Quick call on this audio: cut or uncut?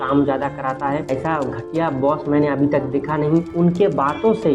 cut